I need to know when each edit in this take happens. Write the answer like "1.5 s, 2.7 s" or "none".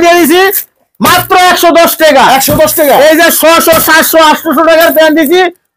none